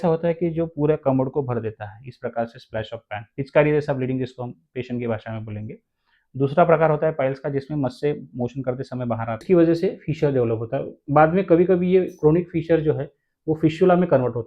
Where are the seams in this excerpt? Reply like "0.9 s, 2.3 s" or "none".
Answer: 9.4 s